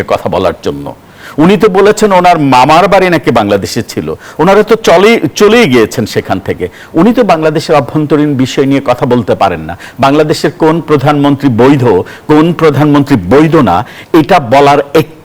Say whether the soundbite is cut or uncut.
uncut